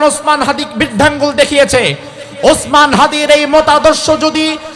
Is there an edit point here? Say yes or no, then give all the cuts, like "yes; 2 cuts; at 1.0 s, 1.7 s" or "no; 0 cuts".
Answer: no; 0 cuts